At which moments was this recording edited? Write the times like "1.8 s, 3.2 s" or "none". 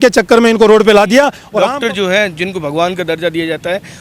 1.4 s